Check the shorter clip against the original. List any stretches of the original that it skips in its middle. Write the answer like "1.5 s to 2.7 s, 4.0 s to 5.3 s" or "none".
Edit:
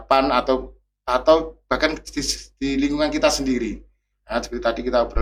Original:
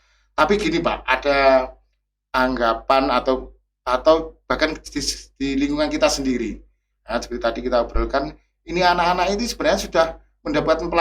none